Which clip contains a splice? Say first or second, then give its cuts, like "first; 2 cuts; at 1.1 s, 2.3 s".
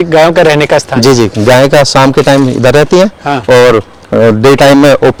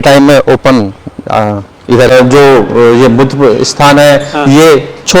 second; 1 cut; at 2.1 s